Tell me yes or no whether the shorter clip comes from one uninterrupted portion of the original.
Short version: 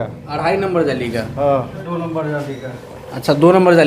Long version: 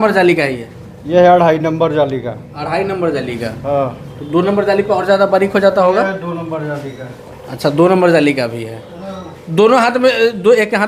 no